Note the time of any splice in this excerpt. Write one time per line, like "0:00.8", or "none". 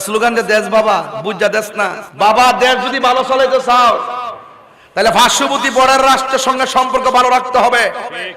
0:02.0